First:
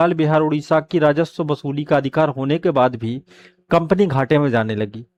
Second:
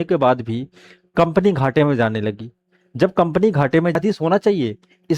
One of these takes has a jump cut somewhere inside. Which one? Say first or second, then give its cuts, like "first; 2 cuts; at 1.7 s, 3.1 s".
second; 1 cut; at 4.0 s